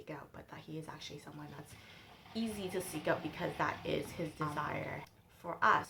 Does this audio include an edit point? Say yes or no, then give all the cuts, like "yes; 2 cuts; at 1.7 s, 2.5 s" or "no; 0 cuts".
no; 0 cuts